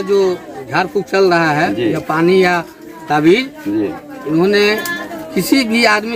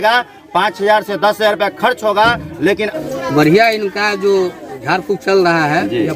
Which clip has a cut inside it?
second; 1 cut; at 2.9 s

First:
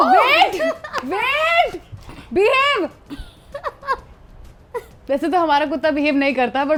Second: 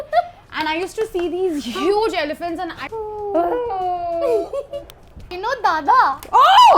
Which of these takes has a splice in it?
second; 2 cuts; at 2.8 s, 5.3 s

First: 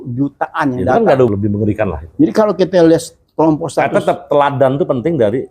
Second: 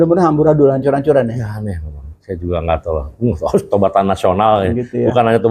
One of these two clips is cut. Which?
first; 1 cut; at 1.3 s

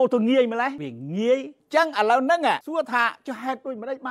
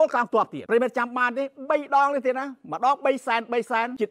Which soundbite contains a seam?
first; 1 cut; at 1.6 s

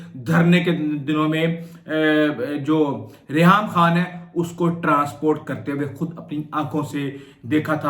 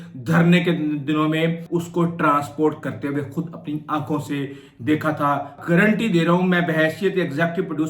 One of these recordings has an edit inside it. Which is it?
second; 2 cuts; at 1.6 s, 5.5 s

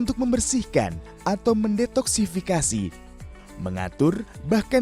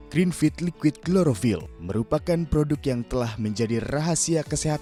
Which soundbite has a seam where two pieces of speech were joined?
first; 1 cut; at 3.1 s

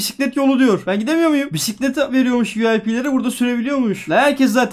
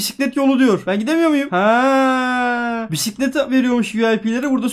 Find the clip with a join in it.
first; 1 cut; at 1.5 s

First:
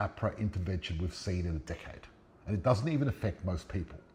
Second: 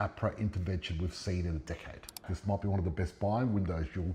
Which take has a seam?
second; 1 cut; at 2.3 s

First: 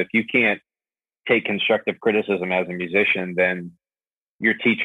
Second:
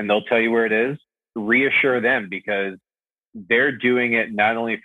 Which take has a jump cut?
second; 1 cut; at 1.1 s

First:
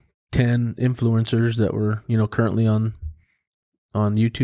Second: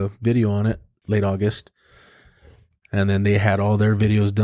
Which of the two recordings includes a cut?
second; 1 cut; at 0.9 s

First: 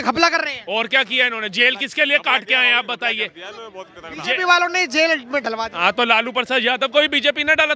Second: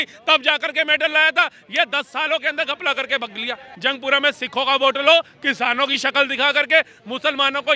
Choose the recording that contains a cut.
second; 1 cut; at 3.7 s

